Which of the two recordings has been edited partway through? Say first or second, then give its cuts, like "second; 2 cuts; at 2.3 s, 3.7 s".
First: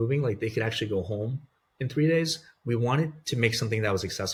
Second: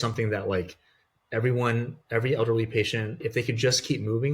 second; 1 cut; at 3.2 s